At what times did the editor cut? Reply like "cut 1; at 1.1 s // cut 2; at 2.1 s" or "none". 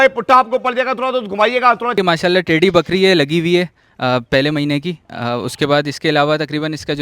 cut 1; at 2.0 s

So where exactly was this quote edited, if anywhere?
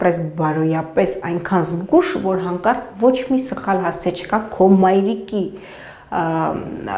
none

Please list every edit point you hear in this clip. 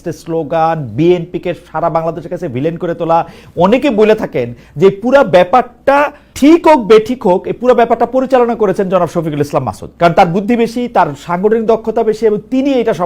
none

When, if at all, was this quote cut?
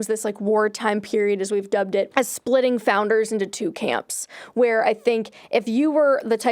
cut 1; at 2.1 s

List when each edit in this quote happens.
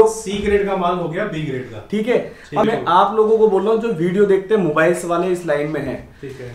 cut 1; at 2.6 s

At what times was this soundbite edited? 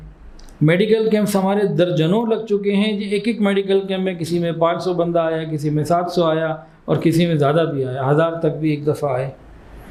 none

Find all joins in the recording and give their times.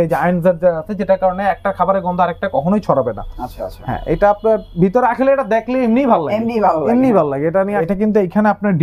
cut 1; at 7.6 s

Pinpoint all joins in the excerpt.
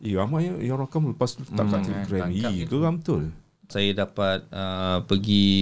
cut 1; at 3.7 s

